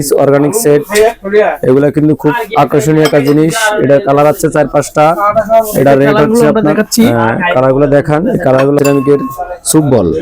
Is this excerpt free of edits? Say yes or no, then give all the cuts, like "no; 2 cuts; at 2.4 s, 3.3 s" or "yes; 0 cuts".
no; 1 cut; at 8.8 s